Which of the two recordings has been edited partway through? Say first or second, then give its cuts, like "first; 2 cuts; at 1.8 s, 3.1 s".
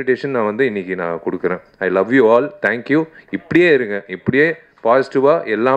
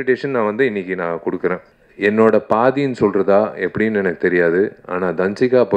second; 1 cut; at 1.7 s